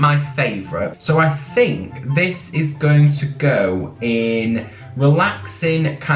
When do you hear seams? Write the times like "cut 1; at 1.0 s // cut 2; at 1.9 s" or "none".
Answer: none